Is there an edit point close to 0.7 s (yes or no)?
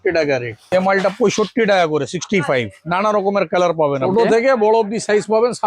yes